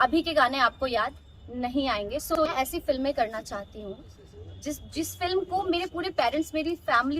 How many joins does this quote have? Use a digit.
1